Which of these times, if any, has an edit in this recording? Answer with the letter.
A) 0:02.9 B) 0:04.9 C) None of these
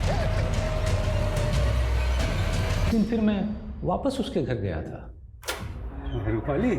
A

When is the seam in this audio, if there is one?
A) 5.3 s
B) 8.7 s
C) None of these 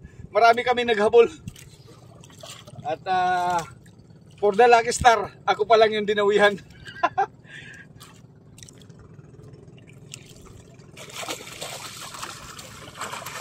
B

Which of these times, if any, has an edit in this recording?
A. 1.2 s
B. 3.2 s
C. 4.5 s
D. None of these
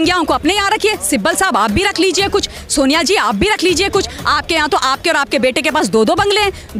D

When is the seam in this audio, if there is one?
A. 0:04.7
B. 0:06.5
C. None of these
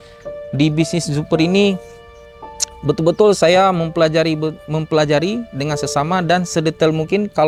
C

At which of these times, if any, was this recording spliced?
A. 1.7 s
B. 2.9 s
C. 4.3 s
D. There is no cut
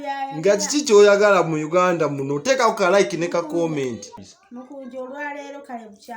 C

